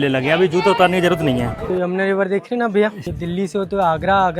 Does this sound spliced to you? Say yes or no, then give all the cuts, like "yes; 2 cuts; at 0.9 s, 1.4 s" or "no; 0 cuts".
yes; 2 cuts; at 1.7 s, 3.1 s